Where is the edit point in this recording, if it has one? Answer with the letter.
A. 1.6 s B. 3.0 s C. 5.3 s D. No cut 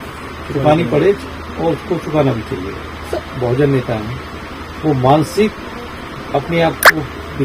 B